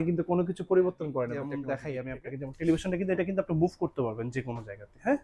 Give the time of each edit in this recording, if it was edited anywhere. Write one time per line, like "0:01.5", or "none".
0:01.6